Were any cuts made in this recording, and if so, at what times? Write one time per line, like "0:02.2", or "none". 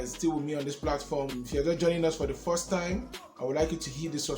0:00.9